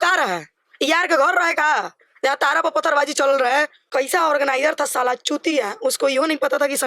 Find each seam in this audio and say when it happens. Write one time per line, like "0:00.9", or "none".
0:03.8